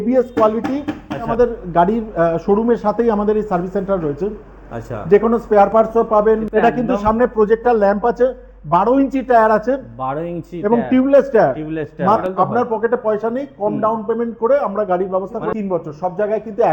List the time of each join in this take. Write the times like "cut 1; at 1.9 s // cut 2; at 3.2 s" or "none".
cut 1; at 1.3 s // cut 2; at 6.5 s // cut 3; at 12.2 s // cut 4; at 15.5 s